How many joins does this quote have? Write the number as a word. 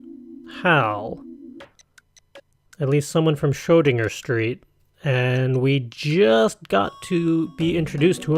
one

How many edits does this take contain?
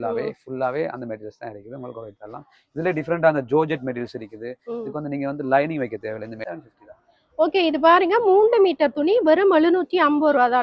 one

